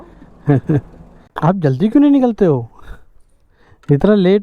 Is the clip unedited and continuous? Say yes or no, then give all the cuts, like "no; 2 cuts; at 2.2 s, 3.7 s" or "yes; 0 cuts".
no; 1 cut; at 1.2 s